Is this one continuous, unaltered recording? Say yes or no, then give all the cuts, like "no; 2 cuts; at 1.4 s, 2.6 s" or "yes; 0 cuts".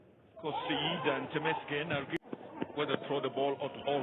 no; 1 cut; at 2.2 s